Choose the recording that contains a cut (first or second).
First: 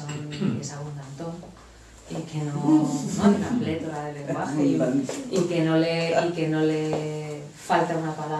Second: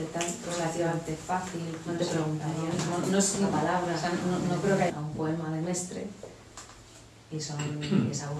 second